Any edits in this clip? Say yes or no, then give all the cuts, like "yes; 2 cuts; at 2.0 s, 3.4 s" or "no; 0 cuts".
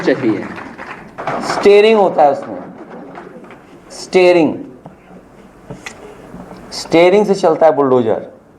yes; 1 cut; at 1.2 s